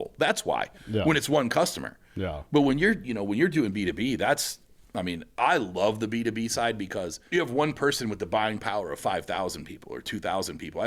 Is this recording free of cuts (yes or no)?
no